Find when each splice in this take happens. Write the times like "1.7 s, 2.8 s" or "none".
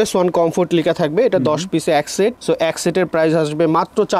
none